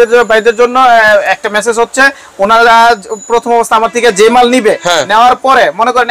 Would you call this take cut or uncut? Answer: uncut